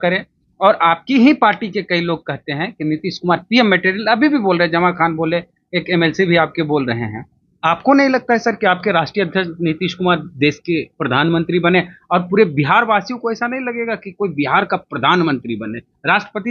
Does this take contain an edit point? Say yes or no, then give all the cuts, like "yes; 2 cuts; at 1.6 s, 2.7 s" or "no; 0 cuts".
no; 0 cuts